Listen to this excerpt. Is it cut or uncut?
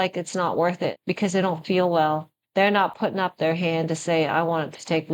cut